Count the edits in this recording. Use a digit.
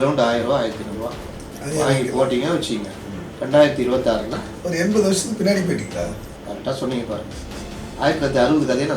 1